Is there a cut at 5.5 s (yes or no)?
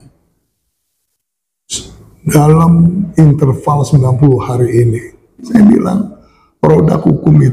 yes